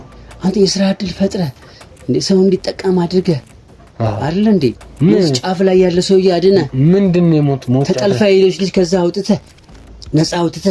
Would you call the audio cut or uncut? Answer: uncut